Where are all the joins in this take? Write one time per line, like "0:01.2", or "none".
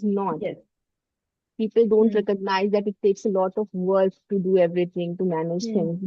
none